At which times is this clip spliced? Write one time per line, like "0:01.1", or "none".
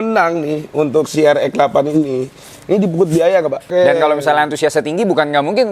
0:03.7

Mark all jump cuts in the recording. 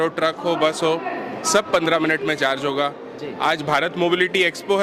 none

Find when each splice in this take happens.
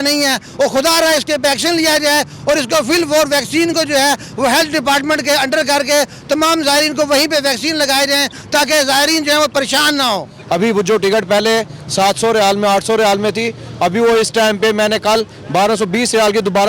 0:10.3

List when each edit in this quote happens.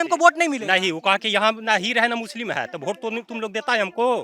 none

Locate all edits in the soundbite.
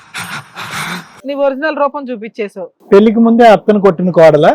0:01.2
0:02.7

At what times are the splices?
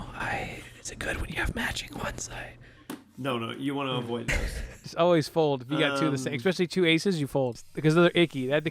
0:04.7
0:07.5

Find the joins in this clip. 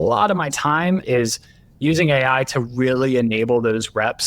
0:01.0

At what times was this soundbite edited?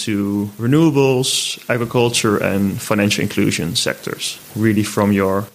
none

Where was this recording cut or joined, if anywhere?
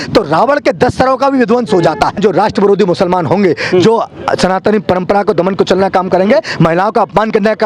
0:02.2

